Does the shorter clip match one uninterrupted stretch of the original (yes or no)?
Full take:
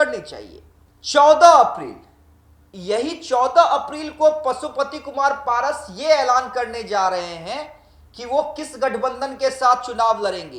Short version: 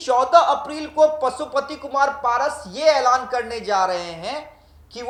yes